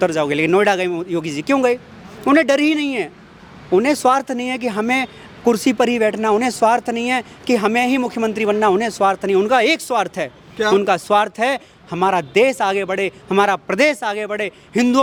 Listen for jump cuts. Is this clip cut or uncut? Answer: uncut